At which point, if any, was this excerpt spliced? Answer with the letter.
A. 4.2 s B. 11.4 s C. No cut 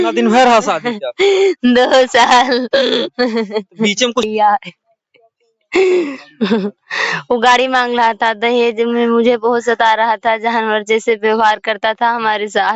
A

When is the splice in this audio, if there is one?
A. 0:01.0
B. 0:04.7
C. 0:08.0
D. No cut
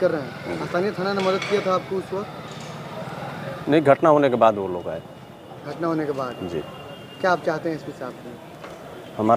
D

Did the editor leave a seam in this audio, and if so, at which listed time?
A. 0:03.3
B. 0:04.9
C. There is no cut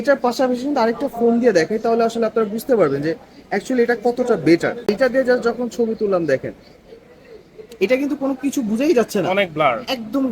B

